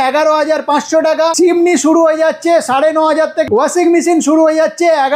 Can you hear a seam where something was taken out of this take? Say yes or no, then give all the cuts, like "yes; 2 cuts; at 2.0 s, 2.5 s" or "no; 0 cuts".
yes; 2 cuts; at 1.3 s, 3.5 s